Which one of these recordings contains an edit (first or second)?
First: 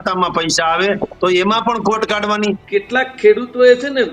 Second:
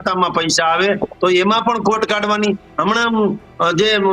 first